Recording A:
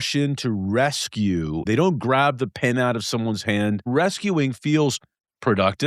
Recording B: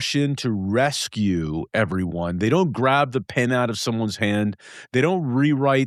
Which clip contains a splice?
A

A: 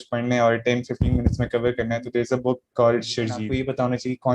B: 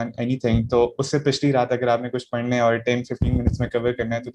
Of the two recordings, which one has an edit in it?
A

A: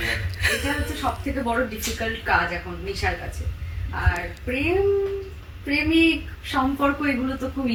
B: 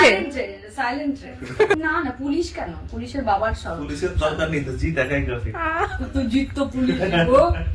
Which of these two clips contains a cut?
B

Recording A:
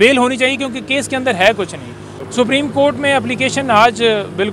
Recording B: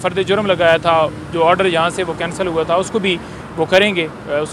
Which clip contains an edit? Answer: A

